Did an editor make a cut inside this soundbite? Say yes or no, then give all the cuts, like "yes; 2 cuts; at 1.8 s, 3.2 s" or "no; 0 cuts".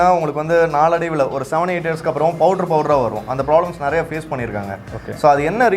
no; 0 cuts